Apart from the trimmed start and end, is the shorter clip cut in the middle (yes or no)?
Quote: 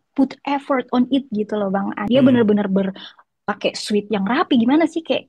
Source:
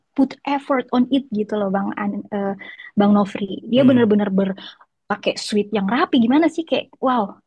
yes